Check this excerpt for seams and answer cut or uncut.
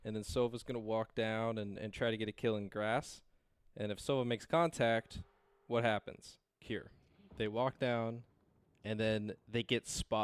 cut